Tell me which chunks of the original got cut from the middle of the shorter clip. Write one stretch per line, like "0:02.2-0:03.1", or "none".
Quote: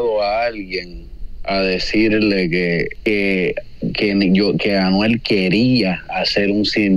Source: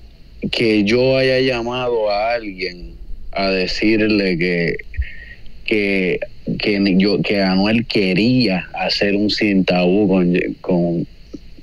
0:04.8-0:05.6